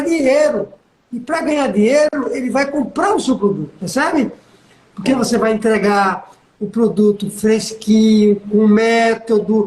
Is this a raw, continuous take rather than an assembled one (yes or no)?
no